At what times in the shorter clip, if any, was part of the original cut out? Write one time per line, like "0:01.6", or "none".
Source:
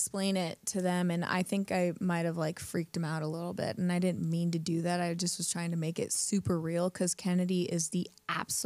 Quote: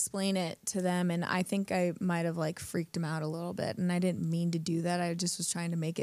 none